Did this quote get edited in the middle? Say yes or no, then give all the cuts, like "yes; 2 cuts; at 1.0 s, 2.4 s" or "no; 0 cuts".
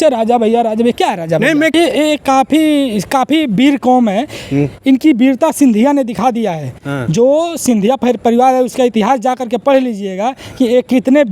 yes; 1 cut; at 1.7 s